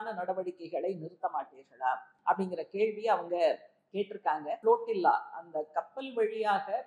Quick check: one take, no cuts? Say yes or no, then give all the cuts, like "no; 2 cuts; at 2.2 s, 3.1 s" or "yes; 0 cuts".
no; 2 cuts; at 2.1 s, 4.6 s